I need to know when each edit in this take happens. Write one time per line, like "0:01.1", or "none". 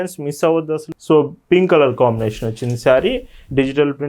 0:00.9